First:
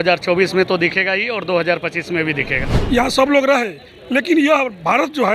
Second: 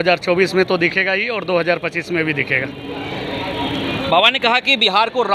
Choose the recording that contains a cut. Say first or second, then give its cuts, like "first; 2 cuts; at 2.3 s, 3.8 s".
first; 1 cut; at 2.7 s